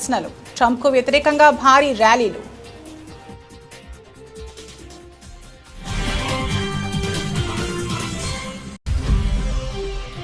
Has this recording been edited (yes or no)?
no